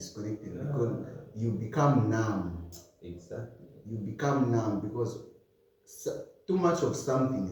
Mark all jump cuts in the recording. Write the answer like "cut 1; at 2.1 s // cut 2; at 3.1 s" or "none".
none